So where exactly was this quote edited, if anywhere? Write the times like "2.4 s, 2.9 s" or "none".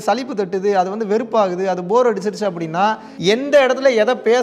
3.1 s